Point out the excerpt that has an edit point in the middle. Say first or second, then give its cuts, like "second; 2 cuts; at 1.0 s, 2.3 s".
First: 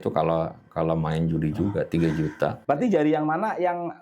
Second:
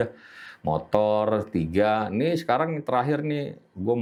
first; 1 cut; at 2.6 s